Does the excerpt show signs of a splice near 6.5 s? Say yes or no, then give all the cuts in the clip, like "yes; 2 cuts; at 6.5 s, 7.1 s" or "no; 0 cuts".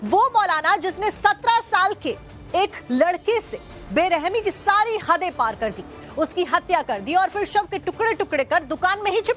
no; 1 cut; at 0.9 s